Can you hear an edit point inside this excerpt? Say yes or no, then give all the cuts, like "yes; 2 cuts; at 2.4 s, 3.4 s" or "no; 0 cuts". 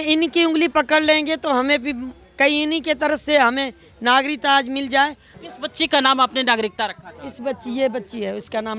yes; 1 cut; at 5.3 s